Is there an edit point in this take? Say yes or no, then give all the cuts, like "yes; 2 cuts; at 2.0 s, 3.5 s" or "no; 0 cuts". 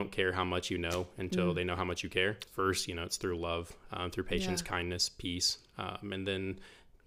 yes; 1 cut; at 2.4 s